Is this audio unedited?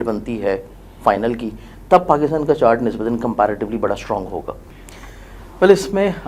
no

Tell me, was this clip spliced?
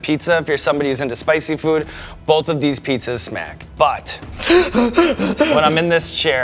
yes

